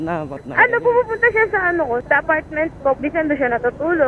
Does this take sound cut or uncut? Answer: cut